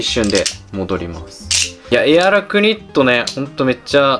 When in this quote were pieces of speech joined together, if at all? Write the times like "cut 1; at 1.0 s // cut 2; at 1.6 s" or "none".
cut 1; at 1.9 s